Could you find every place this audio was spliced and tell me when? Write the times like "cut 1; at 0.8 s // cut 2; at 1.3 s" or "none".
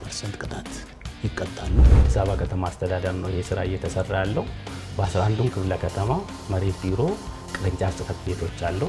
cut 1; at 2.0 s